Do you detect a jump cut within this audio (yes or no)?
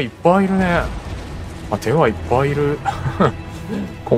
no